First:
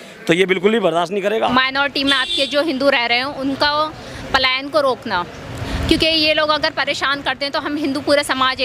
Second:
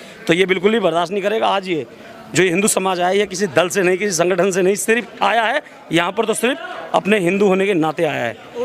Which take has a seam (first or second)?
first